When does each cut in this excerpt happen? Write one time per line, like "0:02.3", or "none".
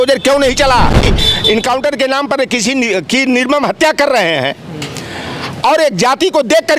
0:01.2